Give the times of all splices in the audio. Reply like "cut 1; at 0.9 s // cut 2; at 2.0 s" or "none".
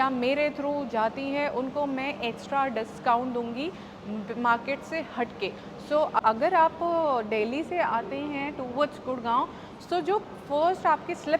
cut 1; at 6.2 s